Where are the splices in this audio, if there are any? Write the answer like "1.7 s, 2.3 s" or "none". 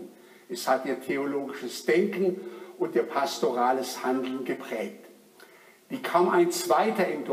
2.7 s